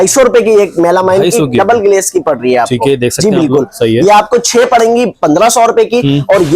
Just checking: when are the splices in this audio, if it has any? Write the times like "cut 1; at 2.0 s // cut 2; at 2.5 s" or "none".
none